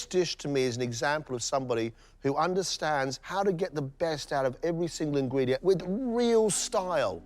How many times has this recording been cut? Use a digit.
1